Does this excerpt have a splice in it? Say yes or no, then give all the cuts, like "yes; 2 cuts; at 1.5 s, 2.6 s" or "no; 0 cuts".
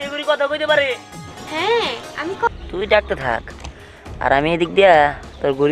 yes; 1 cut; at 2.5 s